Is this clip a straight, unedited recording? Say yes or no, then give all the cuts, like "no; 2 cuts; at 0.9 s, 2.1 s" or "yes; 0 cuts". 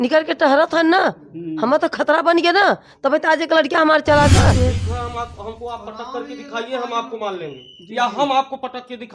no; 1 cut; at 4.5 s